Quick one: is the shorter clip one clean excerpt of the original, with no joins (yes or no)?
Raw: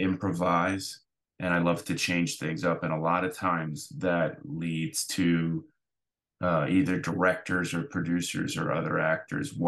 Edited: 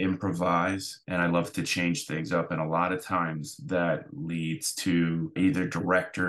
no